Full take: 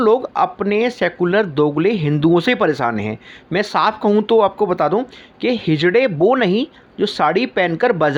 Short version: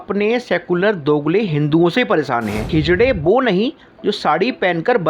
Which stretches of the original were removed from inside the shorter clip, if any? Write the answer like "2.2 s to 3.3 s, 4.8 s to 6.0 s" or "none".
3.2 s to 5.6 s

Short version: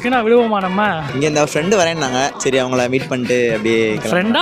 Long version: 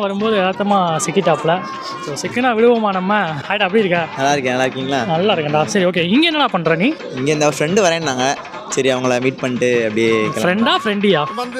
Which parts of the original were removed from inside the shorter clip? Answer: 3.4 s to 7.1 s, 8.4 s to 8.7 s

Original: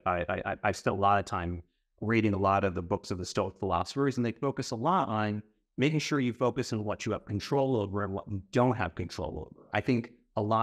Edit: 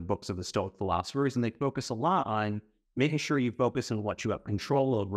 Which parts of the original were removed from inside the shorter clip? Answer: none

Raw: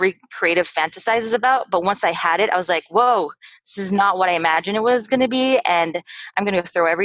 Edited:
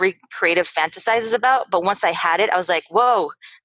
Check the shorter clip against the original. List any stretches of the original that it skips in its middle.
none

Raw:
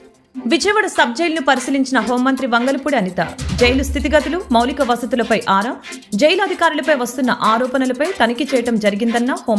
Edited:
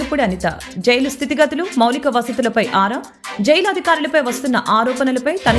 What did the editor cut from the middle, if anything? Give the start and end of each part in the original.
none

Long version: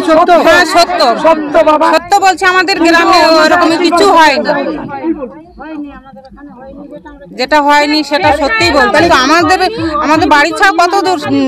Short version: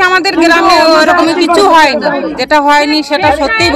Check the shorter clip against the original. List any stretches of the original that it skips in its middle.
4.8 s to 7.4 s

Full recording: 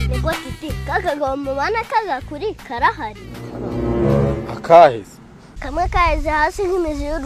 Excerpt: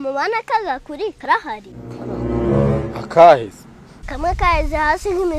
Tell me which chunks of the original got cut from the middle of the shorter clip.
2.6 s to 2.7 s

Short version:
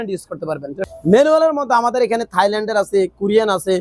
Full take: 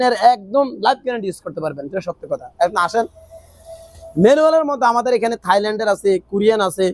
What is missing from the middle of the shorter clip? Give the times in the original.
2.1 s to 4.0 s

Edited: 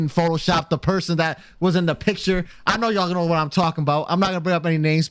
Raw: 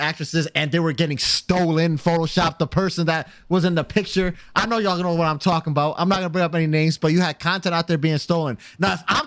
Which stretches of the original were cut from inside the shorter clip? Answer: none

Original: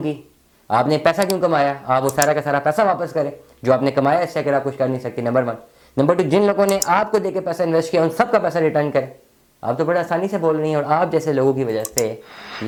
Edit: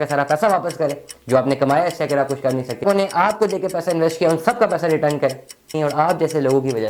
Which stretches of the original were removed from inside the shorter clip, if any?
5.2 s to 6.5 s, 9.5 s to 10.7 s

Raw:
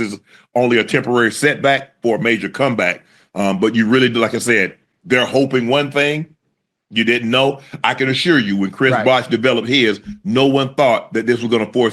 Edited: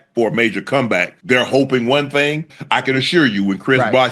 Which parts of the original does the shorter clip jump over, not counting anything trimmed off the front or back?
3.0 s to 4.9 s, 6.4 s to 7.7 s

